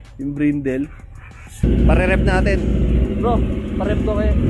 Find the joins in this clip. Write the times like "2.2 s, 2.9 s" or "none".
1.6 s